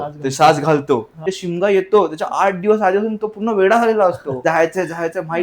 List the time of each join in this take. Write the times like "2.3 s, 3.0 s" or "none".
1.3 s, 4.4 s